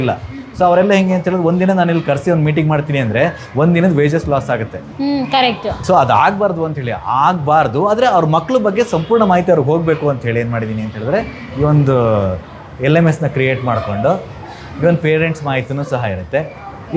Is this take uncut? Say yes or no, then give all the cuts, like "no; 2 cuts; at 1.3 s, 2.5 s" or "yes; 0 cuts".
yes; 0 cuts